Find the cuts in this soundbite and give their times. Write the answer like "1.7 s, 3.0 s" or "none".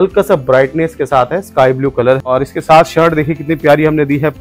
2.3 s